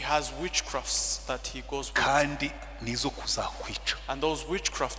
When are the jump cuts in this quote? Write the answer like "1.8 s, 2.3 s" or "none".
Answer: none